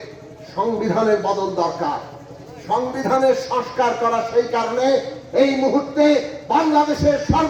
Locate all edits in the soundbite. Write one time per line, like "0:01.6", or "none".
none